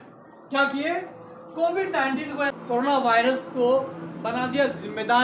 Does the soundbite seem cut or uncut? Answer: cut